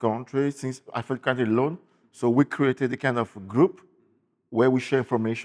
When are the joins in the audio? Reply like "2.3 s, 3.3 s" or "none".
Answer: none